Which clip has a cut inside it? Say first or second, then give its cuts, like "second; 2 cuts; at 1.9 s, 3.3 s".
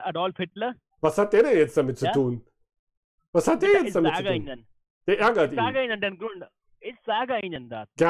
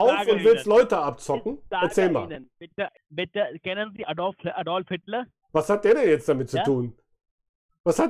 second; 1 cut; at 3.0 s